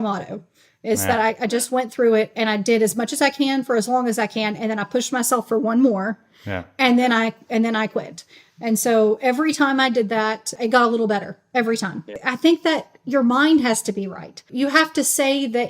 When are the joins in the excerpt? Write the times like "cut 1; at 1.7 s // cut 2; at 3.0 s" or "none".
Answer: cut 1; at 10.6 s // cut 2; at 12.2 s // cut 3; at 14.5 s